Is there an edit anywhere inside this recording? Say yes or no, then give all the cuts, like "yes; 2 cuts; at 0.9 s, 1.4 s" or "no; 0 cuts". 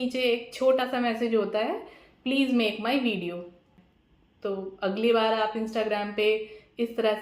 yes; 1 cut; at 3.8 s